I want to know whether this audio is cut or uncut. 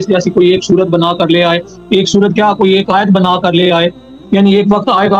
cut